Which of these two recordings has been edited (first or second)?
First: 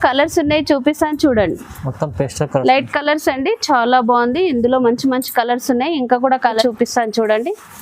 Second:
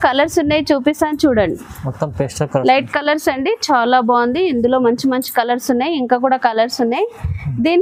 first